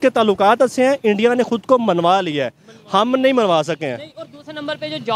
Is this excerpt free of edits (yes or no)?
yes